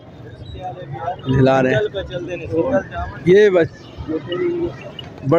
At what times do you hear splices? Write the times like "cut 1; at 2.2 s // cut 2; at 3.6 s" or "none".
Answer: none